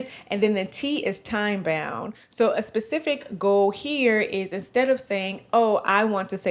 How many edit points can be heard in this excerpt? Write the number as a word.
zero